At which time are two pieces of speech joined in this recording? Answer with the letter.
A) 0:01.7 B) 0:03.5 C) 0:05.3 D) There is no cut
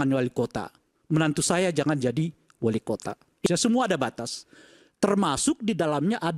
B